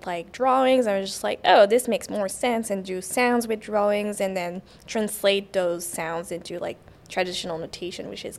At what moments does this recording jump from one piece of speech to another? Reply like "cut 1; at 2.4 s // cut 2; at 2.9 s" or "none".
none